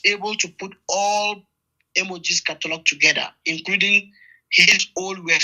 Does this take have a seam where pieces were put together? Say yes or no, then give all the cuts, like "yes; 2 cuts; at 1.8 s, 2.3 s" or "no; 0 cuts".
no; 0 cuts